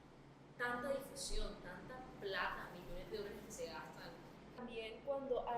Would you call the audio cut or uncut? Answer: cut